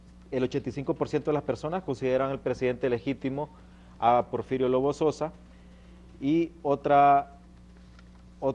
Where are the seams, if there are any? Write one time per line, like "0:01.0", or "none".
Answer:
0:02.1